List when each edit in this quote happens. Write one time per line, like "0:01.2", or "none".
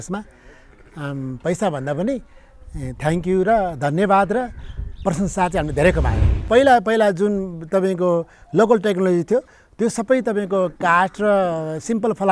0:06.4